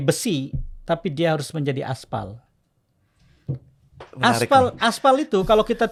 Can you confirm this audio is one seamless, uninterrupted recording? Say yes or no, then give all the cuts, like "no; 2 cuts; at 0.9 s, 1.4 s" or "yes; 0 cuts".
yes; 0 cuts